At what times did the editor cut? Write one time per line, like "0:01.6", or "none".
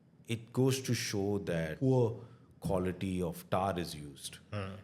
0:01.7